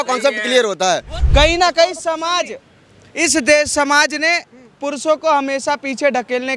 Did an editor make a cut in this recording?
yes; 1 cut; at 1.2 s

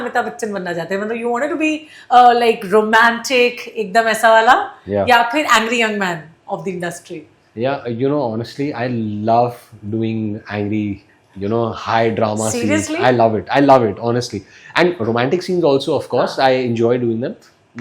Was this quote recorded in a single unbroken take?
yes; 0 cuts

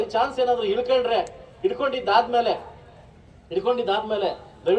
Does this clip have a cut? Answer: no; 0 cuts

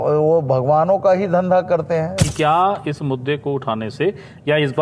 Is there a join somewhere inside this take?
yes; 1 cut; at 2.2 s

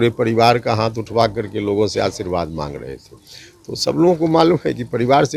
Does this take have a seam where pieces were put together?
no; 0 cuts

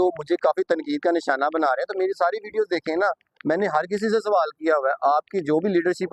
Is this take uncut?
yes; 0 cuts

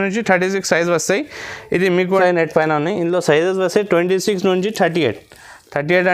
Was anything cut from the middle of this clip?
yes; 1 cut; at 2.2 s

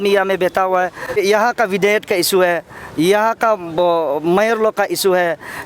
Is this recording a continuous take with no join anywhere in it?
no; 1 cut; at 1.2 s

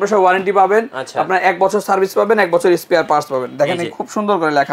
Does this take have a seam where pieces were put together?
no; 0 cuts

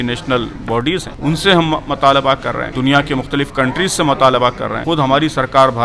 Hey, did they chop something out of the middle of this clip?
yes; 3 cuts; at 1.1 s, 2.7 s, 4.7 s

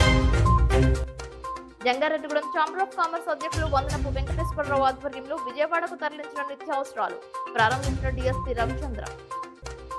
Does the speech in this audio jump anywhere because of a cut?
no; 0 cuts

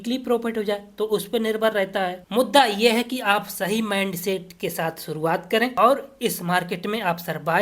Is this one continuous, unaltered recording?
no; 2 cuts; at 2.2 s, 5.7 s

